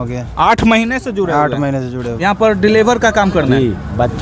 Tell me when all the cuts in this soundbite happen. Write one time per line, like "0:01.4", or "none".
0:02.0